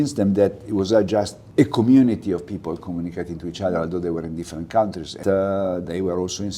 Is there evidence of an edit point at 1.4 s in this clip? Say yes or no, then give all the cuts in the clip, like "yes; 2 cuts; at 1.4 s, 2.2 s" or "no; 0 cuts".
yes; 2 cuts; at 1.4 s, 5.1 s